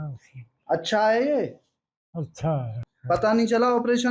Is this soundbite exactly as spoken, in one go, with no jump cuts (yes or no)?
no